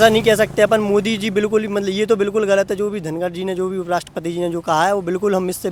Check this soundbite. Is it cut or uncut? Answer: uncut